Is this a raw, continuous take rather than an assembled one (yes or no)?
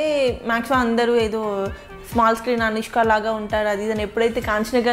yes